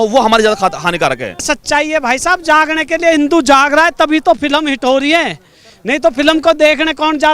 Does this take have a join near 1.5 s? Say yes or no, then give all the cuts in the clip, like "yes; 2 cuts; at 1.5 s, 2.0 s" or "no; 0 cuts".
yes; 1 cut; at 1.5 s